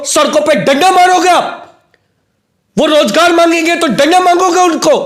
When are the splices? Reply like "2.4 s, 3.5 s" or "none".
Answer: none